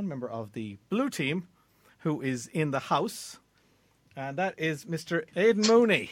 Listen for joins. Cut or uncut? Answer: cut